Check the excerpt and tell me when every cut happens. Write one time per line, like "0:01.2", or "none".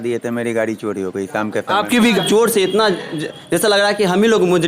0:02.2